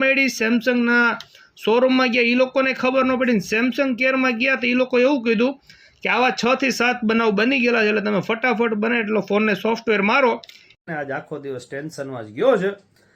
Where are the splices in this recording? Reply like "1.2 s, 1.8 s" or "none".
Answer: 10.7 s